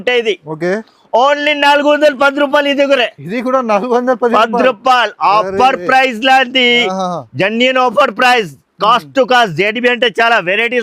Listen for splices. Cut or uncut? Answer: uncut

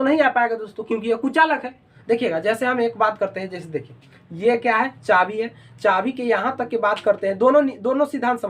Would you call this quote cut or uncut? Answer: cut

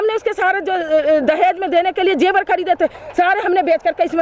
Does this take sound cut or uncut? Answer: uncut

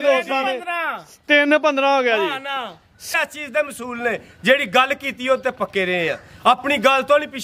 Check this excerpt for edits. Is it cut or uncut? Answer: cut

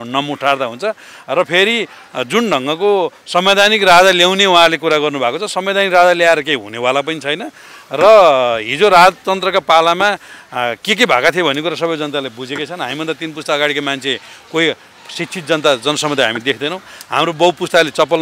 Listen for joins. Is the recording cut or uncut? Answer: uncut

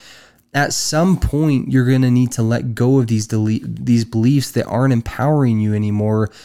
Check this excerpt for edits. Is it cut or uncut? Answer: uncut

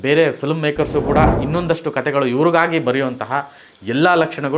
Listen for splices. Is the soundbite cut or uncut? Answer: uncut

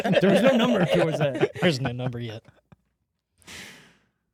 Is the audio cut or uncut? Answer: uncut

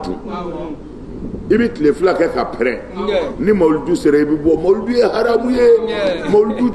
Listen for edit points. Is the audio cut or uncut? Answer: uncut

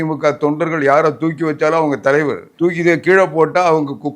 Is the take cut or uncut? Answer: cut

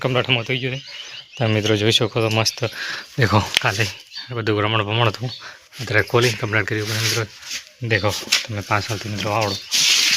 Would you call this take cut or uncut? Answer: uncut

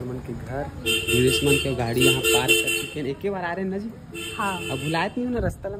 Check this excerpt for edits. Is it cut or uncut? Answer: uncut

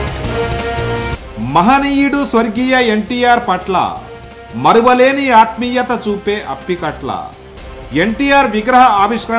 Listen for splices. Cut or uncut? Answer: uncut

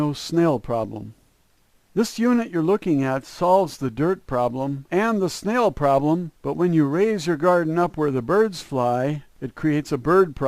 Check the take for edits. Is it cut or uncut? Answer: cut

